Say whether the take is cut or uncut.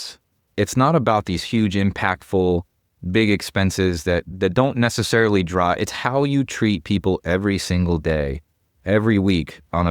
cut